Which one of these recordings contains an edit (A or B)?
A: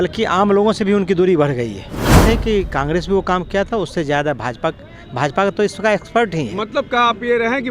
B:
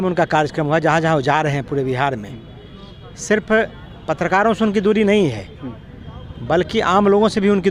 A